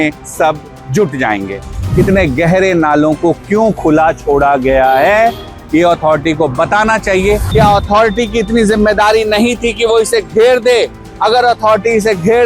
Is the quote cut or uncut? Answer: cut